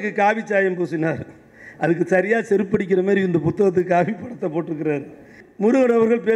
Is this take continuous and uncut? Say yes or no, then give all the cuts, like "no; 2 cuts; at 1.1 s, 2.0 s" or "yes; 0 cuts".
no; 1 cut; at 5.4 s